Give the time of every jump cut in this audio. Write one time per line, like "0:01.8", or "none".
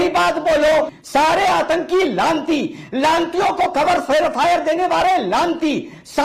0:01.0